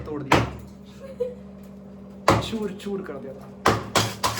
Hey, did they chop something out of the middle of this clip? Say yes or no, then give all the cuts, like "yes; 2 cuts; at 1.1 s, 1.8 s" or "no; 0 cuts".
no; 0 cuts